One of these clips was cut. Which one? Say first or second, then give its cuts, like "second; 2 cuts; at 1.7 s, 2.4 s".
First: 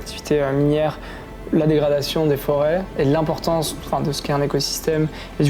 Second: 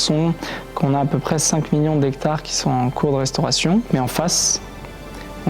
second; 1 cut; at 3.9 s